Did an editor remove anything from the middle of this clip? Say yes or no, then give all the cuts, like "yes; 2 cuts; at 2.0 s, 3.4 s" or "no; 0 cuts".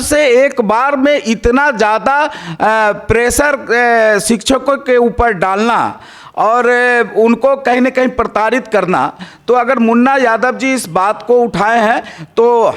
no; 0 cuts